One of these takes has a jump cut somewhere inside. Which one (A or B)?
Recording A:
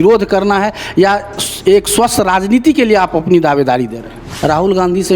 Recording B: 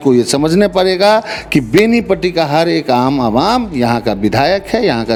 A